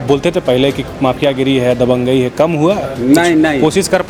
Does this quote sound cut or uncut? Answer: uncut